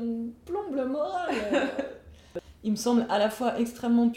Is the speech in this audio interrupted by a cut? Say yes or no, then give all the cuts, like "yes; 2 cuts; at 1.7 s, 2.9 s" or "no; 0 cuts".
yes; 1 cut; at 2.5 s